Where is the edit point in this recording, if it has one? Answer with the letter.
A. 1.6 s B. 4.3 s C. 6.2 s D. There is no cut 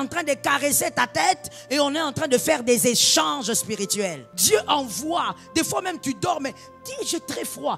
B